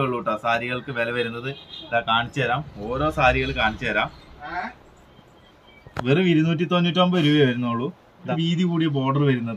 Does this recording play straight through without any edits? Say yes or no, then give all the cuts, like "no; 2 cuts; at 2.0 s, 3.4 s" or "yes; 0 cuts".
no; 1 cut; at 8.3 s